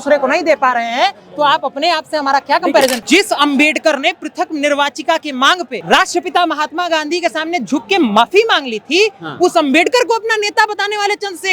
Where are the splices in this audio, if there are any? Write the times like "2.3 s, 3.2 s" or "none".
3.0 s, 5.8 s

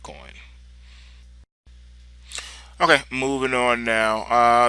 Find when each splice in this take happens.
none

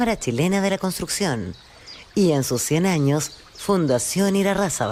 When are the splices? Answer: none

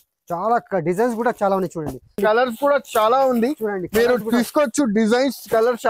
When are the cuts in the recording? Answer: 2.2 s

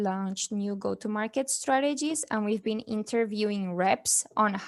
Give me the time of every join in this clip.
none

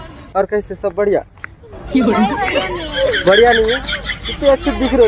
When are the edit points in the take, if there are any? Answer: none

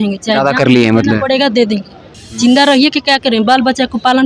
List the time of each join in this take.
2.1 s

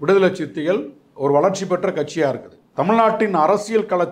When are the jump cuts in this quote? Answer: 2.6 s

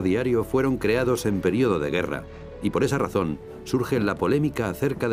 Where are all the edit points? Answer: 1.6 s

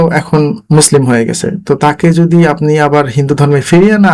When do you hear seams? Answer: none

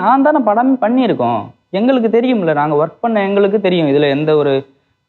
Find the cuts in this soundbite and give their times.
none

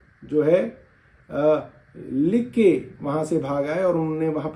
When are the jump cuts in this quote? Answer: none

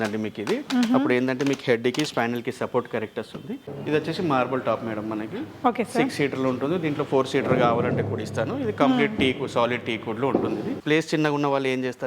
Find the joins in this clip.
3.6 s, 10.8 s

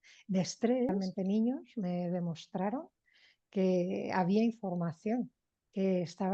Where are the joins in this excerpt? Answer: 0.9 s

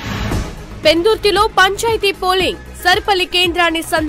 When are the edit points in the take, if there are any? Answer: none

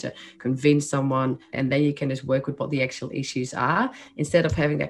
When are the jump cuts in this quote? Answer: 1.5 s

